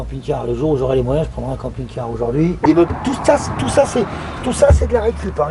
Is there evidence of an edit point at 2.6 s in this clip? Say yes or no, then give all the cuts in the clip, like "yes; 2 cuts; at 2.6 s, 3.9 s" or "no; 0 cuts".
yes; 1 cut; at 2.6 s